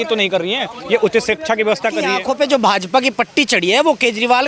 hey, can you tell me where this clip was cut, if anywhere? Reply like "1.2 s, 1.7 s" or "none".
2.1 s